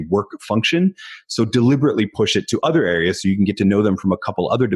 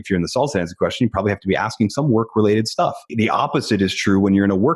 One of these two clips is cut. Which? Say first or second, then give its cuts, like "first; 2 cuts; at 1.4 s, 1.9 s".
second; 1 cut; at 3.1 s